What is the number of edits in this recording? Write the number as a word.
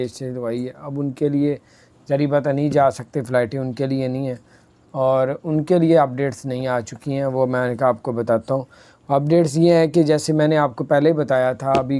zero